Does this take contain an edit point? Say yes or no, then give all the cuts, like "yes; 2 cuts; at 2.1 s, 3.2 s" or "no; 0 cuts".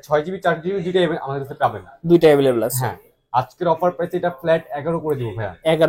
no; 0 cuts